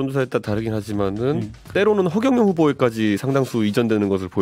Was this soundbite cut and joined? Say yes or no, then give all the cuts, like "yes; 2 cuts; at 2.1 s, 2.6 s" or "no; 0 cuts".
yes; 1 cut; at 1.7 s